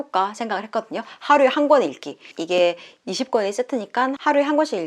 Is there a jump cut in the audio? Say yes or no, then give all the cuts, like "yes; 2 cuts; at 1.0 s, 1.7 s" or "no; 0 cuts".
yes; 1 cut; at 2.3 s